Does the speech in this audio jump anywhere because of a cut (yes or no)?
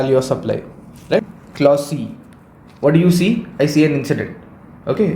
yes